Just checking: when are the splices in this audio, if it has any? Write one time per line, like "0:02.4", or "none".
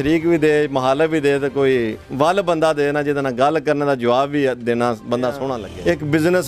none